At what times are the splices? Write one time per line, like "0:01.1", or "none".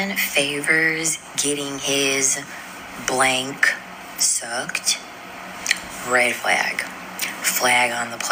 none